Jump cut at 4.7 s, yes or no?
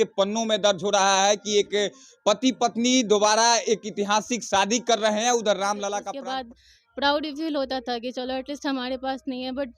no